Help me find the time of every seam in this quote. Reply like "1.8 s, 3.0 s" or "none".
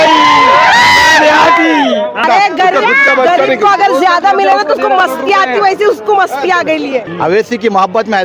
2.2 s, 7.1 s